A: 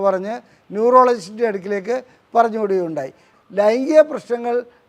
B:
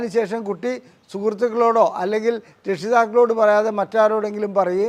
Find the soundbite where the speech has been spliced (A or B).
A